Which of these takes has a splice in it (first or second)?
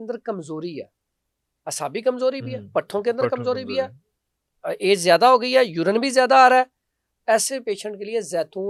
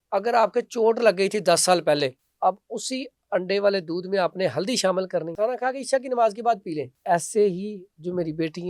second